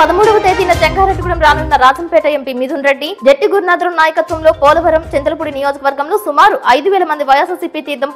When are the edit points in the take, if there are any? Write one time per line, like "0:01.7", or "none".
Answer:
none